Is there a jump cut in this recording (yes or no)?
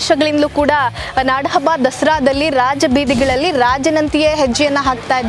no